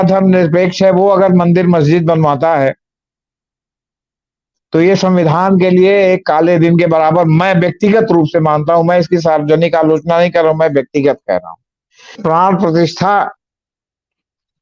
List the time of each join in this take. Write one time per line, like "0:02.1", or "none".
0:12.2